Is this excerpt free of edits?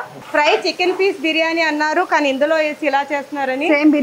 yes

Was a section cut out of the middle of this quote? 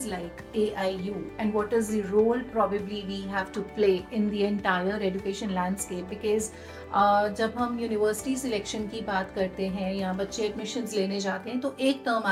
no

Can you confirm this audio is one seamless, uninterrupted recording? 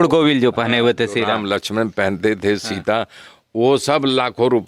yes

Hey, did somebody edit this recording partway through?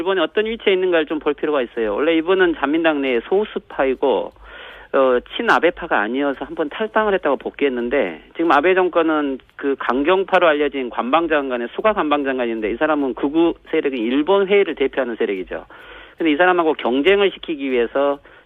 no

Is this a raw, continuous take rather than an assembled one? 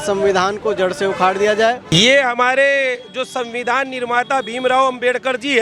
no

